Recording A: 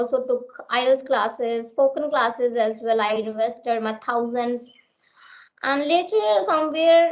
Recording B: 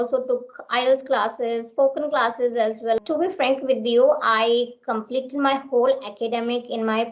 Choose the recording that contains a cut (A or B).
B